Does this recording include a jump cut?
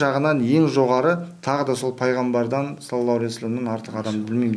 no; 0 cuts

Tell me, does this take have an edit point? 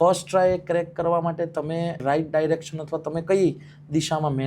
yes; 1 cut; at 2.0 s

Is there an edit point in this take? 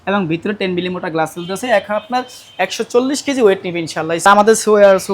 yes; 1 cut; at 4.2 s

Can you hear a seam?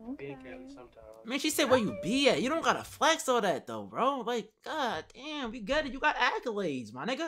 no; 0 cuts

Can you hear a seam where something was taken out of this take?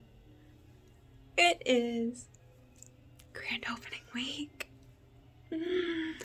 no; 0 cuts

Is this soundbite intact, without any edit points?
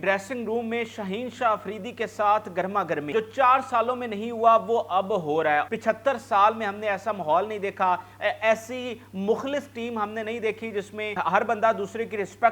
no; 3 cuts; at 3.1 s, 5.7 s, 11.2 s

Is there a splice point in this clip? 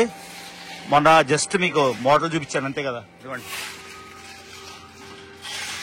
no; 0 cuts

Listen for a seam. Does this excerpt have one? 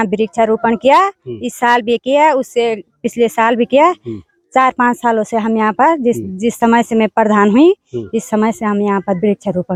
no; 0 cuts

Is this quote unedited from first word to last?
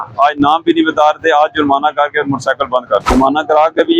no; 1 cut; at 3.1 s

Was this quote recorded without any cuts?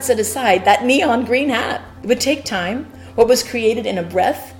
no; 2 cuts; at 1.8 s, 3.0 s

